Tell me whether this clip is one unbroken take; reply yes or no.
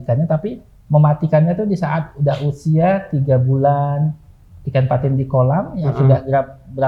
yes